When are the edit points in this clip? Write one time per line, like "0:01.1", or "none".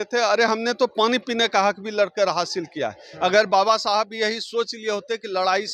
none